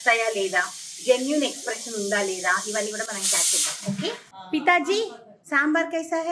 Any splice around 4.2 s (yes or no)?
yes